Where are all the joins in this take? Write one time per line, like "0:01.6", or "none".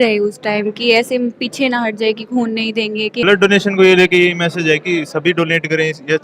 0:03.2